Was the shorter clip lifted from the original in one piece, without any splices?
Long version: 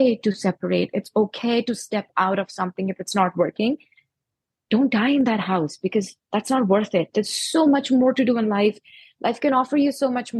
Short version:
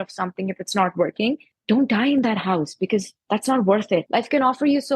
no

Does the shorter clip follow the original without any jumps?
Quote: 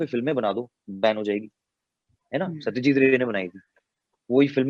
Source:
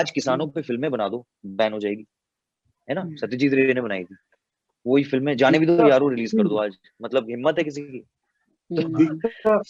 yes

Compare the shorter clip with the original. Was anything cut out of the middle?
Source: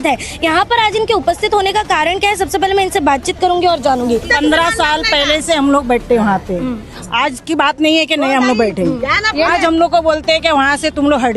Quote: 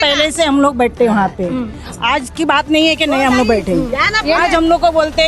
no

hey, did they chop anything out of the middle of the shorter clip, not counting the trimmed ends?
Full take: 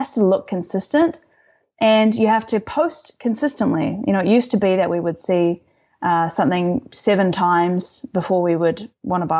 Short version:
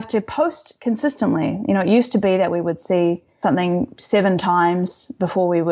yes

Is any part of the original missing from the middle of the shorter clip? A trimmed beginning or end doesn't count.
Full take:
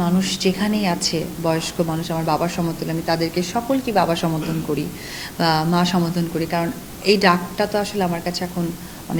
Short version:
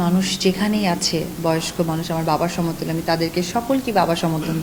no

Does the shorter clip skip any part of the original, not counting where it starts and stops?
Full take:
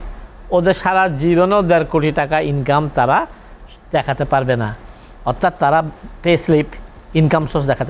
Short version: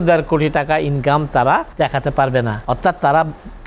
yes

